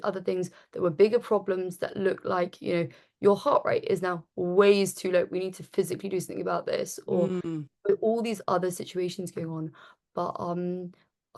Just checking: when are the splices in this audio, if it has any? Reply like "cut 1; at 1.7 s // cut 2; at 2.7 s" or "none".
none